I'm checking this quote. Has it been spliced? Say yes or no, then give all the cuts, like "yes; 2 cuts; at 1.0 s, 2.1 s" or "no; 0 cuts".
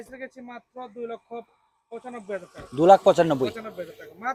no; 0 cuts